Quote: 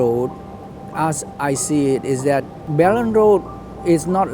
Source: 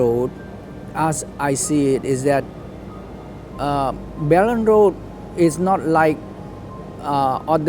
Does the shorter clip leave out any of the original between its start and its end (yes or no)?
yes